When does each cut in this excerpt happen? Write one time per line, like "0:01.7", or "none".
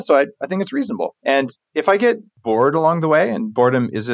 0:01.4
0:02.3